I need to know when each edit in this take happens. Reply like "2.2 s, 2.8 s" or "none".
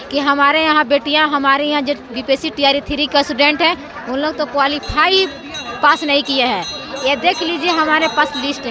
none